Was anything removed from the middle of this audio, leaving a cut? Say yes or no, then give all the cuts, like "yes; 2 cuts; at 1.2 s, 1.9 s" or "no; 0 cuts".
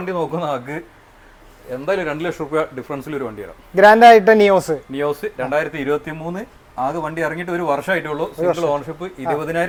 no; 0 cuts